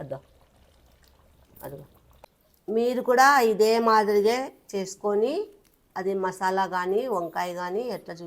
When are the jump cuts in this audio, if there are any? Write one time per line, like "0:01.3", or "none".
0:02.1

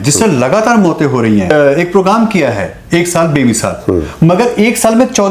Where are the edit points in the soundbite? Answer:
0:01.5

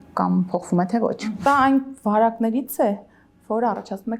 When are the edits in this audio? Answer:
0:01.2

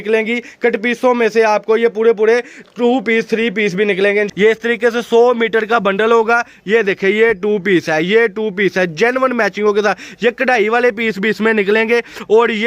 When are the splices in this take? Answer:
0:04.3

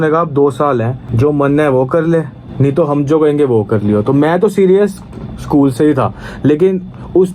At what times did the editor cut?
0:01.0
0:02.4

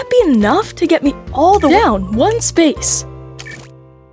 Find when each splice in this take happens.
0:01.7
0:02.8

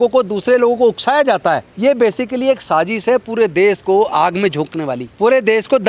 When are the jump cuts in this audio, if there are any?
0:01.7
0:05.0

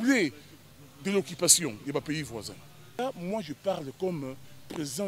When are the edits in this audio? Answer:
0:03.0

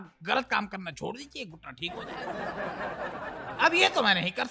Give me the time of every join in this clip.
0:01.9
0:03.1

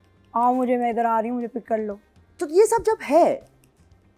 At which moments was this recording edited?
0:02.2

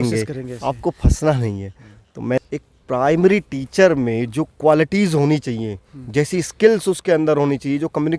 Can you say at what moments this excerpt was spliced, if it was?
0:02.4

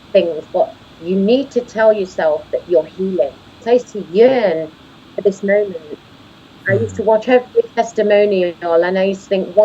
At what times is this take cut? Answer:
0:03.6

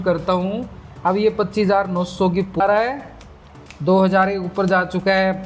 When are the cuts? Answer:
0:02.6

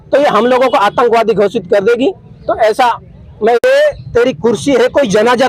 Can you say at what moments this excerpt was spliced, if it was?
0:03.6

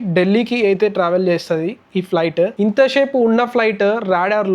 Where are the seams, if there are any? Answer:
0:02.5

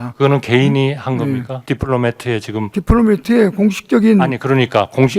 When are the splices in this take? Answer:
0:01.5
0:02.7

